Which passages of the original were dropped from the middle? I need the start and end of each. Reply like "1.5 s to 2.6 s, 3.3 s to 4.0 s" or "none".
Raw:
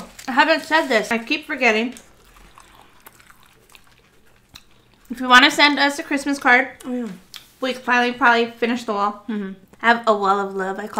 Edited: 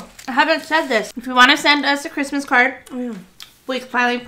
1.1 s to 5.0 s

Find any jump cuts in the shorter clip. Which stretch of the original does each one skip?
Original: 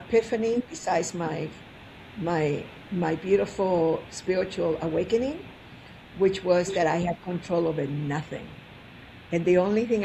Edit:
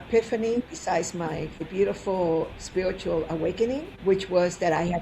1.7 s to 3.2 s, 5.4 s to 6.0 s

